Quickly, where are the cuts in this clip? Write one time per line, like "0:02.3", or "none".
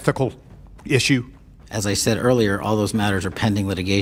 none